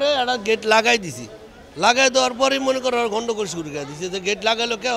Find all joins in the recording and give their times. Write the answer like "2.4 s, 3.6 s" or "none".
none